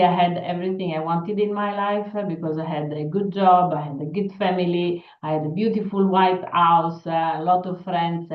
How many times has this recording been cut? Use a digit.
0